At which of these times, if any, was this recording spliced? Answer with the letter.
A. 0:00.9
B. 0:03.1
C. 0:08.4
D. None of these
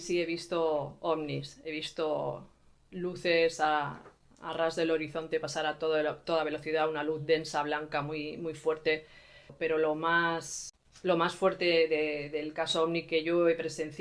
A